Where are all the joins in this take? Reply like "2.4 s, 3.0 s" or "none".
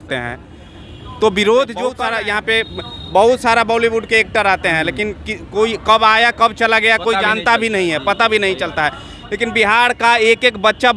2.0 s